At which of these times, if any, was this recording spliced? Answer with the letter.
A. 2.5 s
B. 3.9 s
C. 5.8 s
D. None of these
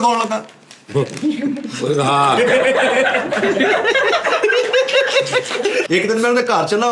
C